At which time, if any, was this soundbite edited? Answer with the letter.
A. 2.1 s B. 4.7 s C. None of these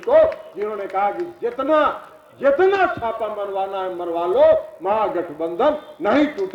C